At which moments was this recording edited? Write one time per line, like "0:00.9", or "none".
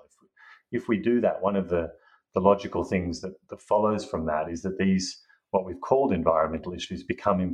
none